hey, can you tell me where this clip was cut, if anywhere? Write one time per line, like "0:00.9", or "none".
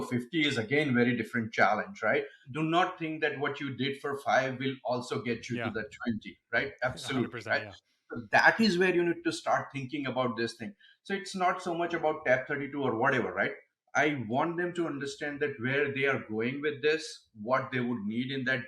0:02.5